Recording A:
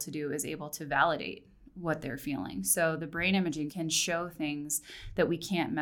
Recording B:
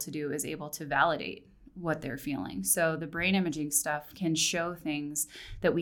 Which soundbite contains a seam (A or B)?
A